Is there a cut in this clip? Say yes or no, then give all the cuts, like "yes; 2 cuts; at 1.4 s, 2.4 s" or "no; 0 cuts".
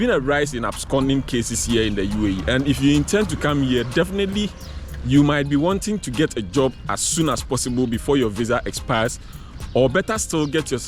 no; 0 cuts